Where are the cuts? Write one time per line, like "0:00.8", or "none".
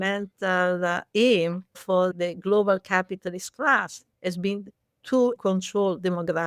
0:02.1
0:05.4